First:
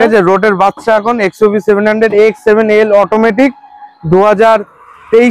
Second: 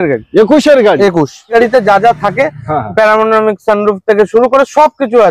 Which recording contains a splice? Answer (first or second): second